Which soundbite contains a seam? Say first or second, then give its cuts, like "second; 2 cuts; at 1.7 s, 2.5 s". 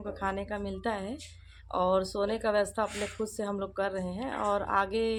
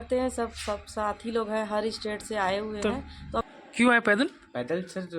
second; 1 cut; at 3.4 s